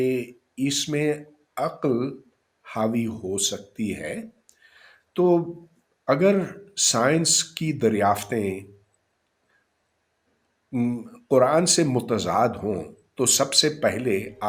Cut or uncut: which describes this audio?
uncut